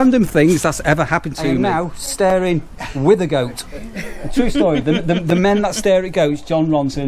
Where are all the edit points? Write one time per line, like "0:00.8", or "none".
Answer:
0:01.5